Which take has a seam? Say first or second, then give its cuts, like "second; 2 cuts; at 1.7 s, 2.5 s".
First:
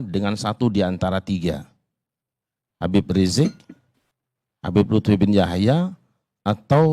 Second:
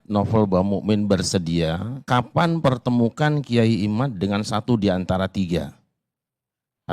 second; 1 cut; at 1.9 s